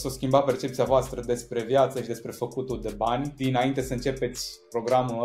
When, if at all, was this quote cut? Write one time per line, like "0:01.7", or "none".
0:03.3